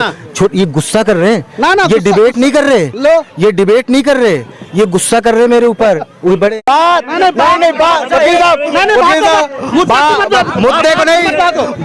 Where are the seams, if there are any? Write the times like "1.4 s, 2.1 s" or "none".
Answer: 6.5 s

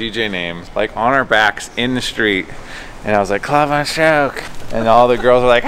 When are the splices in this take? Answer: none

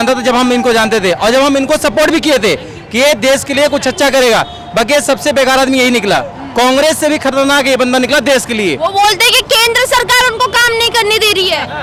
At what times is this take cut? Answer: none

